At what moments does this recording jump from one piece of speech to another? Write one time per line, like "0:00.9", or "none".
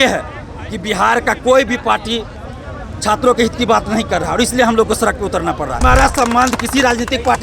0:05.8